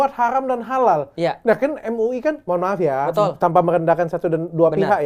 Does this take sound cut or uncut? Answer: uncut